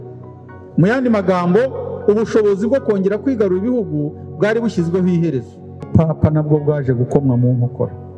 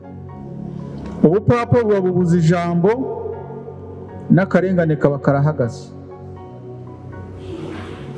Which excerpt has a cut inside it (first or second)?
first